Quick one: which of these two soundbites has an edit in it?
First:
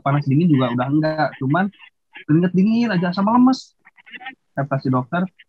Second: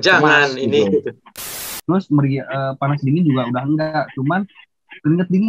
second; 1 cut; at 1.6 s

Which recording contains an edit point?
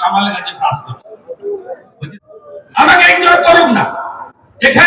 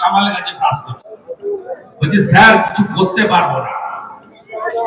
first; 1 cut; at 1.9 s

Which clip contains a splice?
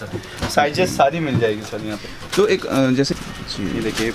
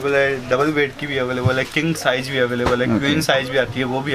first; 1 cut; at 3.1 s

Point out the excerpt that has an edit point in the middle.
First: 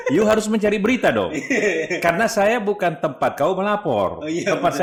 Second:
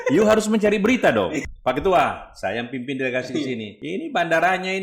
second; 2 cuts; at 1.4 s, 3.7 s

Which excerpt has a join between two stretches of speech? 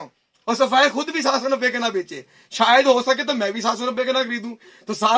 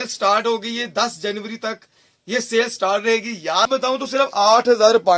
second; 1 cut; at 3.7 s

